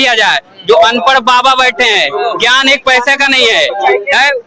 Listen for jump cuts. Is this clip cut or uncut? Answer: uncut